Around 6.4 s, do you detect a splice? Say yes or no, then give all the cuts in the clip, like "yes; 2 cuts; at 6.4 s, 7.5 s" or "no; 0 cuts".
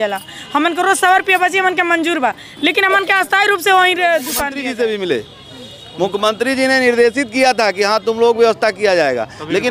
no; 1 cut; at 4.5 s